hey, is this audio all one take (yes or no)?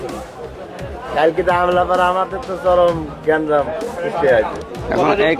yes